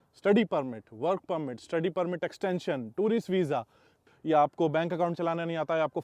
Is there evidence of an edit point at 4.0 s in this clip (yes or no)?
yes